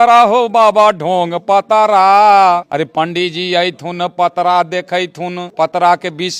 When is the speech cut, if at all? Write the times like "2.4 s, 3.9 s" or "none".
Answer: 2.7 s, 5.4 s